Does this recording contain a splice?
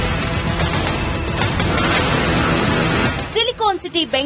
no; 0 cuts

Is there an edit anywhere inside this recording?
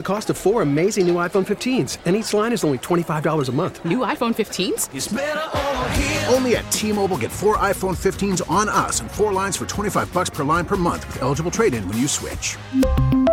no; 0 cuts

